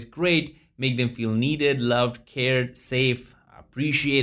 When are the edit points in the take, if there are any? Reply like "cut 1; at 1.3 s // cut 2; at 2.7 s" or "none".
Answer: none